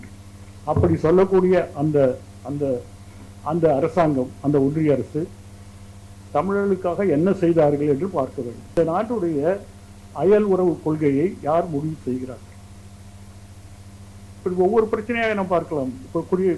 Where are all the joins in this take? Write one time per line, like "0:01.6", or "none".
0:08.8